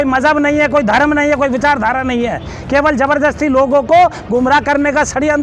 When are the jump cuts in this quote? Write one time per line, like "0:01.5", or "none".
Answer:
none

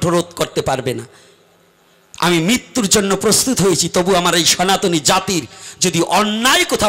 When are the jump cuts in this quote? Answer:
none

